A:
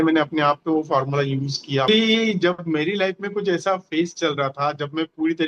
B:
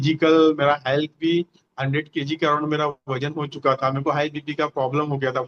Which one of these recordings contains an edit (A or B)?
A